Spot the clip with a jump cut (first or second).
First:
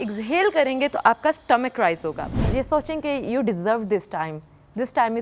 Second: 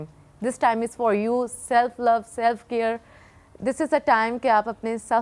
first